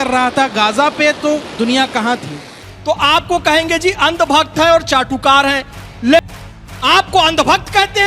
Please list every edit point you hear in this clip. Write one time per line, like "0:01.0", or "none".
0:02.7
0:06.2